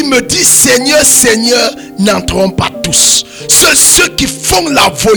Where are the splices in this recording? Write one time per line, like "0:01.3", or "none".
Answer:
none